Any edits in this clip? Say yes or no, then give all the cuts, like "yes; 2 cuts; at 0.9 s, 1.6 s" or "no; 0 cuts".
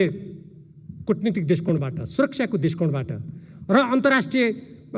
no; 0 cuts